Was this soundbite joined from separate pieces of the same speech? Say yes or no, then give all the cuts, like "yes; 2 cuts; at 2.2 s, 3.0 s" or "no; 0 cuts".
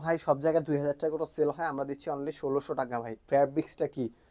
yes; 1 cut; at 3.2 s